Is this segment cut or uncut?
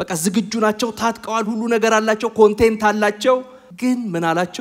cut